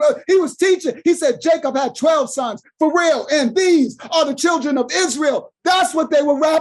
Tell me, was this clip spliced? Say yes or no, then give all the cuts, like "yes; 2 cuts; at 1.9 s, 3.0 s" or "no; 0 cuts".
no; 0 cuts